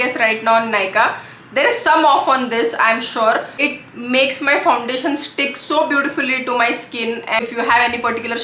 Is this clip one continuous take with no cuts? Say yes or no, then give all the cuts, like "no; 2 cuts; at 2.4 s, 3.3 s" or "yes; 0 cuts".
no; 2 cuts; at 3.6 s, 7.4 s